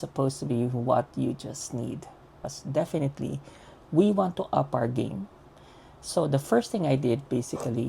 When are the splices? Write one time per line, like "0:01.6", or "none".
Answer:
0:02.5